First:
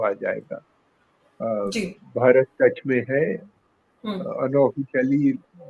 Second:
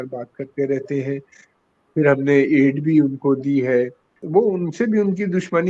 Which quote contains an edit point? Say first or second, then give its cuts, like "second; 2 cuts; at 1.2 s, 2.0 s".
second; 1 cut; at 4.1 s